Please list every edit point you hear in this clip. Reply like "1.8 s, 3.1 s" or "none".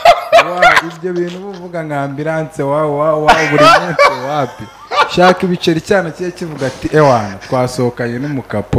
none